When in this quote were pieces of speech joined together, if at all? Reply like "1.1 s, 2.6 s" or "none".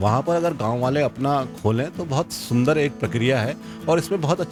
none

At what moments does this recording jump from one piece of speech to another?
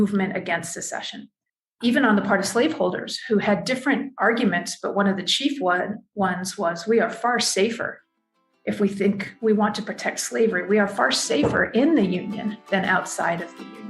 1.8 s

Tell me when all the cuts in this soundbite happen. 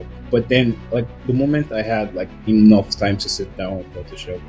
none

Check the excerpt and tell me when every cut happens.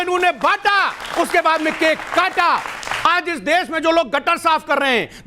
3.1 s

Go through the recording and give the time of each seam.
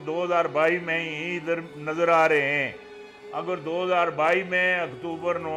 none

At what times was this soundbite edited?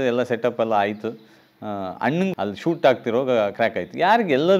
2.3 s

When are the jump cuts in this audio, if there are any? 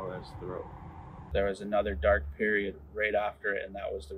1.3 s

